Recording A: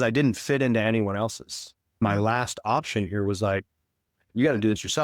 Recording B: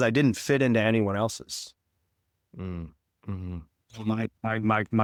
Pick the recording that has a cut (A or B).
A